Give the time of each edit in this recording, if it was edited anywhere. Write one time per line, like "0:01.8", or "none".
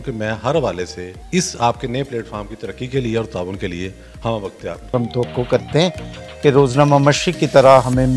0:04.8